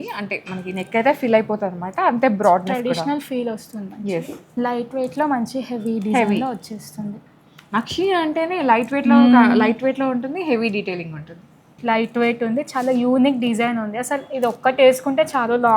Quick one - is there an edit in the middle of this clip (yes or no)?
yes